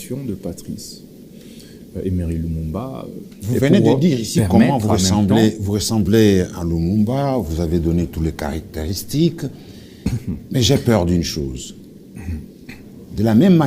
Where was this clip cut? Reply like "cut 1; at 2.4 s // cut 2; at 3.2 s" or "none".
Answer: cut 1; at 3.3 s